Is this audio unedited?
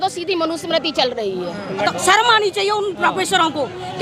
no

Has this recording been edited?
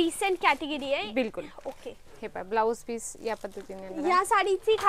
no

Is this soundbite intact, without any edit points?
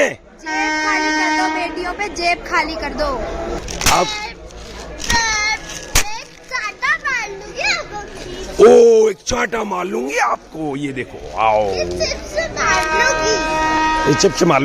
no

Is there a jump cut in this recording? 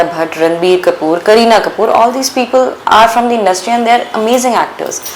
no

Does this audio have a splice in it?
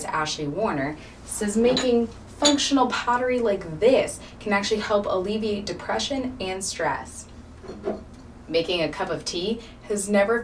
no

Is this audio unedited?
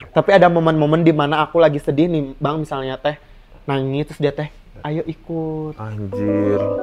yes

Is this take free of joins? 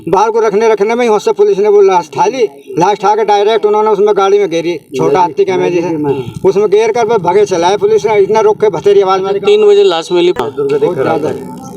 no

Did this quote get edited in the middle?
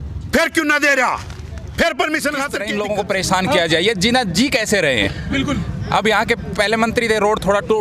yes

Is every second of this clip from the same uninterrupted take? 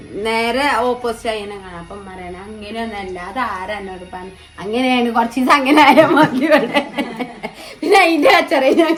yes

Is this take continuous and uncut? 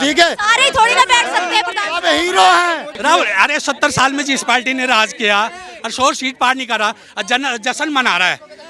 no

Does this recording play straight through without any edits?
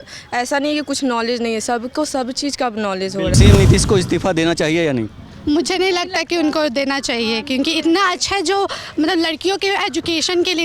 no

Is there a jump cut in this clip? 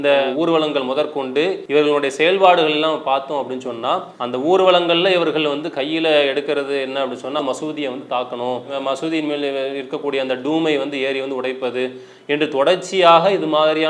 yes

